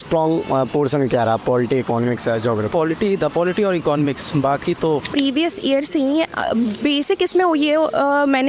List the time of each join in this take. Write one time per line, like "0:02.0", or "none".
0:05.1